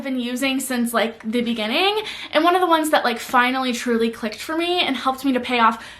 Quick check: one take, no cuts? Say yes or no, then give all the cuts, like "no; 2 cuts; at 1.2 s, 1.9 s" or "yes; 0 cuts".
yes; 0 cuts